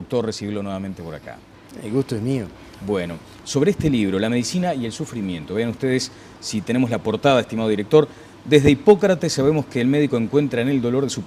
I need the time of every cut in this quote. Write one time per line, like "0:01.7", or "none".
none